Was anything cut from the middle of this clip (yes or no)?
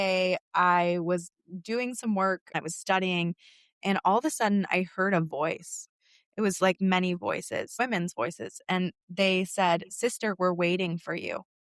yes